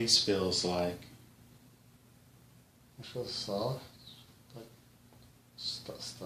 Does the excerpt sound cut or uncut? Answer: uncut